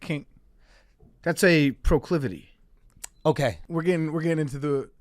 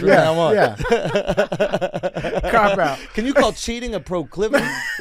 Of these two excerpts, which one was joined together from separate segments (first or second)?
first